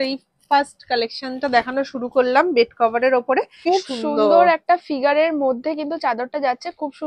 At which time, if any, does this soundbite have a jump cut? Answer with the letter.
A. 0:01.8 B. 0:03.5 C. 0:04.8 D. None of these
B